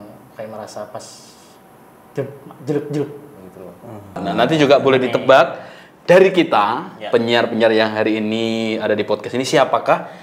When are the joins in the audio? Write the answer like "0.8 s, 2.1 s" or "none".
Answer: 4.2 s

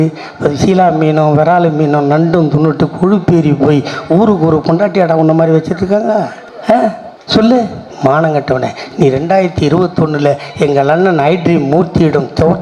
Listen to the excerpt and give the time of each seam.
none

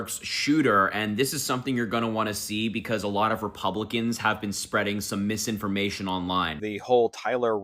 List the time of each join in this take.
6.6 s

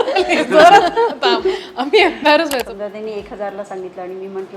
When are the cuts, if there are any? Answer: 2.7 s

